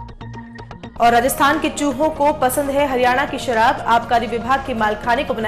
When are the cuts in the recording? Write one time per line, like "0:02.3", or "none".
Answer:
0:00.9